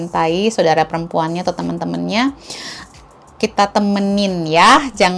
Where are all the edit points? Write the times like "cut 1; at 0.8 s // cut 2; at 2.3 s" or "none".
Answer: none